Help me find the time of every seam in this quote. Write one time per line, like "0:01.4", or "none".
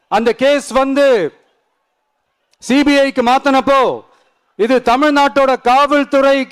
none